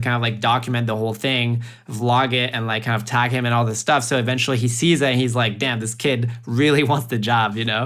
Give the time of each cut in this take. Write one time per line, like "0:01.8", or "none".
none

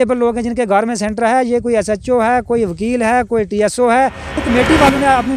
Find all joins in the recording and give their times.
0:04.4

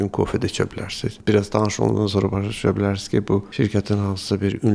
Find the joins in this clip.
0:01.2
0:03.5

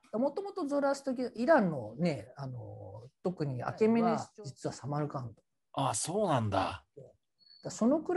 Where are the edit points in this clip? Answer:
0:04.2

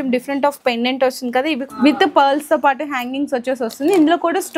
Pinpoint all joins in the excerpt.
0:01.6

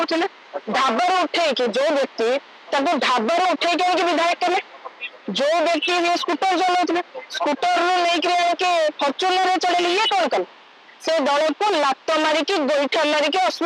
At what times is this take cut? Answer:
none

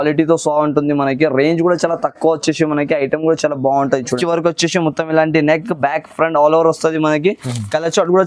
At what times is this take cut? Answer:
0:04.2

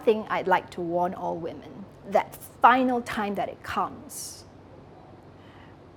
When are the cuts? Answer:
none

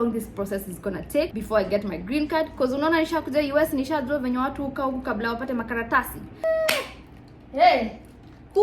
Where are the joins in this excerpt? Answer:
0:01.4
0:06.4

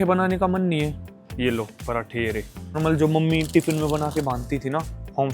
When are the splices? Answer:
0:02.8

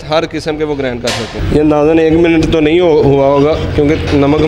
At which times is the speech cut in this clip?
0:01.4

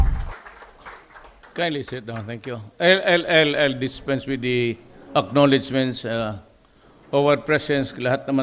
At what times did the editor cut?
0:02.0

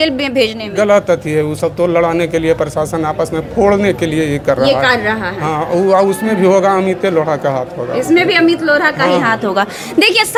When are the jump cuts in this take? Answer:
none

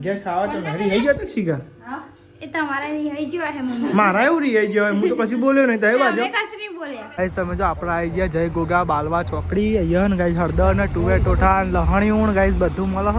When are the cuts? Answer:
0:07.2

